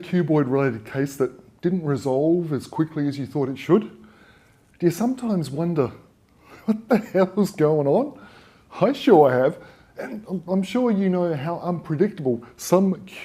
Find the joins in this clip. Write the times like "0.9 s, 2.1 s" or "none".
8.0 s